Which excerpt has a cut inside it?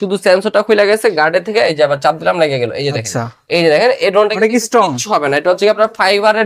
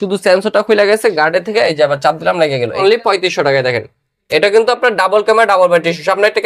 second; 1 cut; at 2.8 s

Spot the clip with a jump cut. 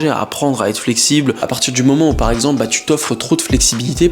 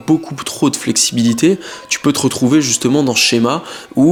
first; 1 cut; at 1.4 s

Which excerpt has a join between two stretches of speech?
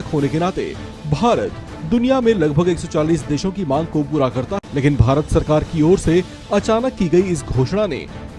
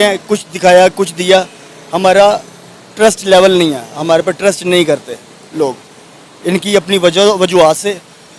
first; 1 cut; at 4.6 s

